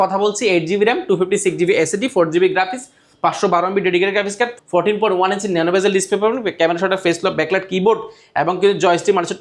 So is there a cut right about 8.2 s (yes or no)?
no